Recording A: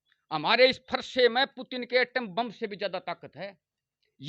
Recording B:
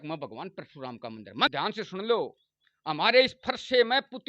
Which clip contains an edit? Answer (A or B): B